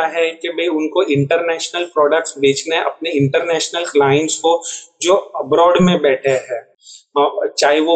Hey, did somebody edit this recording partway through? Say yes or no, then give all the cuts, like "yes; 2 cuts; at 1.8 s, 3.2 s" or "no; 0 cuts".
no; 0 cuts